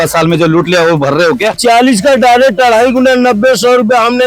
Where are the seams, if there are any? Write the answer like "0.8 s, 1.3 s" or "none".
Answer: 1.6 s